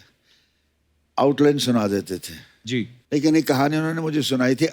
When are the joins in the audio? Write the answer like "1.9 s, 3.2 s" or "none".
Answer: 2.9 s